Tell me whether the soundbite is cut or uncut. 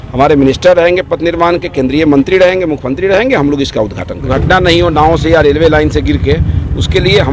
cut